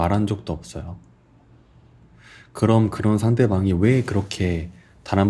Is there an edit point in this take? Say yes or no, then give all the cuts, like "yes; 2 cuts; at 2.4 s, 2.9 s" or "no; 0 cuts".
no; 0 cuts